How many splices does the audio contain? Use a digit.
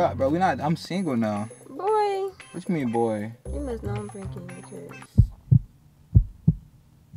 0